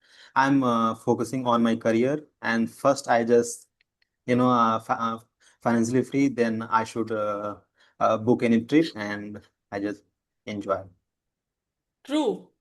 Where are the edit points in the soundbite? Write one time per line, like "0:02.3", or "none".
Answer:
none